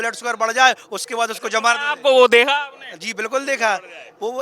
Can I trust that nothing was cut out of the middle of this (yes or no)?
yes